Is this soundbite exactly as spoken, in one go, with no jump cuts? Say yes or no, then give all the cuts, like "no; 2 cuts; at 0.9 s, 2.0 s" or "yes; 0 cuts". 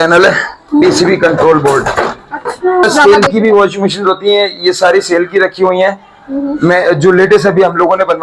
no; 1 cut; at 2.8 s